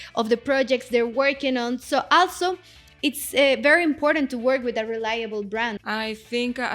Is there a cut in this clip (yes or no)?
yes